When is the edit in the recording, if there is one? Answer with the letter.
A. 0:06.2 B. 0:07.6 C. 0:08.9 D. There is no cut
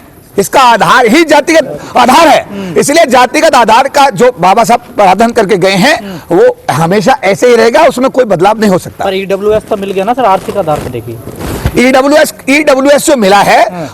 D